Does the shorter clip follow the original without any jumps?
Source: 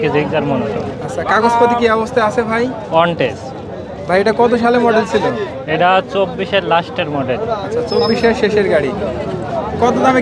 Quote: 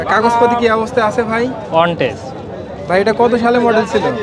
yes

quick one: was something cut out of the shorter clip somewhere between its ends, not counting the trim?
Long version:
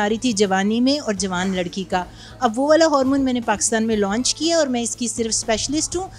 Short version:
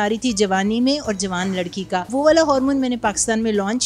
yes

